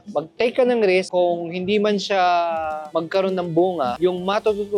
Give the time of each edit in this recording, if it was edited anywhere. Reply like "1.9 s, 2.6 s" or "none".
none